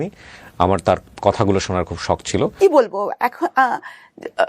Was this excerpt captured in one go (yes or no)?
no